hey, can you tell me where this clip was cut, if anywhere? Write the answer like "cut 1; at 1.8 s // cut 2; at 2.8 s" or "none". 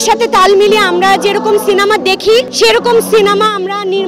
cut 1; at 2.5 s